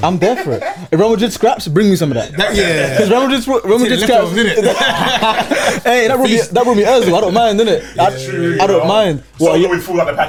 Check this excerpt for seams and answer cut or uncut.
uncut